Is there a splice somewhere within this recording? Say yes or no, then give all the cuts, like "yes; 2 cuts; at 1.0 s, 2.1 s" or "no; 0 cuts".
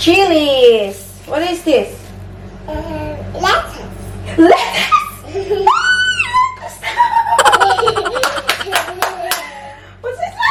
no; 0 cuts